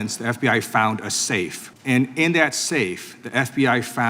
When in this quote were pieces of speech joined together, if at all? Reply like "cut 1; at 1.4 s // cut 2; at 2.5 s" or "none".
cut 1; at 1.6 s